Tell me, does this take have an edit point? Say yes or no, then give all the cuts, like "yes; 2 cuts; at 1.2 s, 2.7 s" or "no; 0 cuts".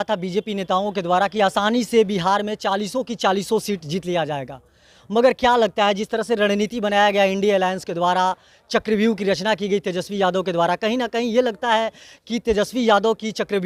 no; 0 cuts